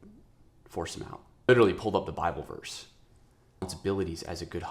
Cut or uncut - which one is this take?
cut